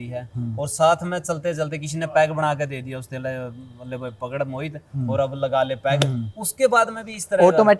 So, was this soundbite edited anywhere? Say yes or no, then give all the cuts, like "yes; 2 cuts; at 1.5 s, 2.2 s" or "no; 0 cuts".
no; 0 cuts